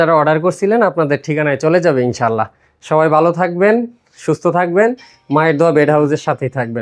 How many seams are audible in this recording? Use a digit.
0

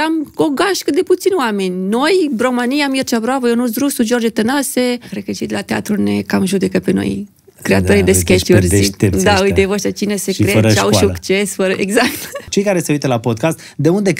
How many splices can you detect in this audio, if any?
2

